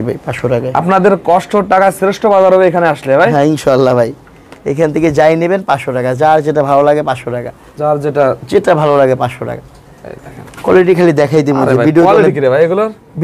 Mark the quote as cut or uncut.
uncut